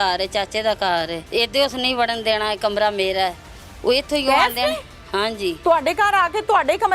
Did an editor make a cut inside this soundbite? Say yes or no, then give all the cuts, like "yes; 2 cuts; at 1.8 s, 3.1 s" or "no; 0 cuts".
yes; 1 cut; at 1.2 s